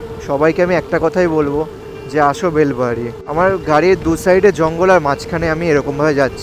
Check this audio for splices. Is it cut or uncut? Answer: cut